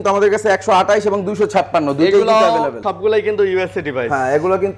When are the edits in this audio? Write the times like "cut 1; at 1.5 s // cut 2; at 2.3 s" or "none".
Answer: cut 1; at 2.8 s